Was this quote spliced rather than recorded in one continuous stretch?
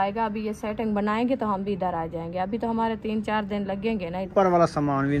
yes; 1 cut; at 4.3 s

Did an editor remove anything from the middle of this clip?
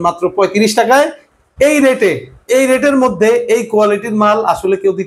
yes; 1 cut; at 1.3 s

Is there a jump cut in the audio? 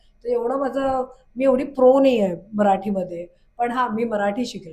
no; 0 cuts

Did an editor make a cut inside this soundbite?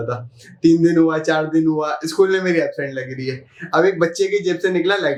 no; 0 cuts

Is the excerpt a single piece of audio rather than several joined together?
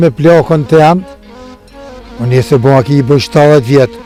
yes; 0 cuts

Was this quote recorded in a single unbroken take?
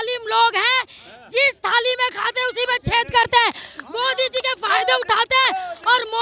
yes; 0 cuts

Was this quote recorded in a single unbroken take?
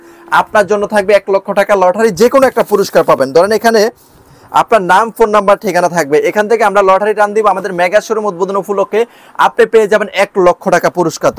yes; 0 cuts

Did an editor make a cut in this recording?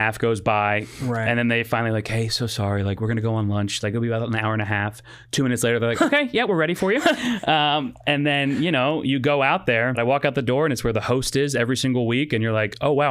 yes; 2 cuts; at 0.9 s, 10.0 s

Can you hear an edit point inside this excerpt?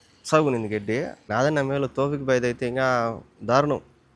yes; 1 cut; at 1.2 s

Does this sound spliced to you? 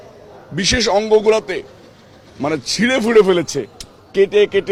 no; 0 cuts

